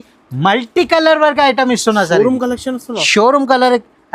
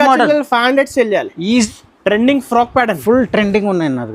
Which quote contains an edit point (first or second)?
second